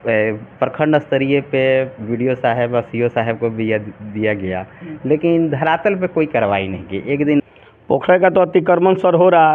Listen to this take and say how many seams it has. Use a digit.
1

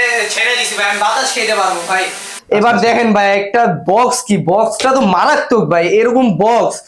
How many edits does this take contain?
1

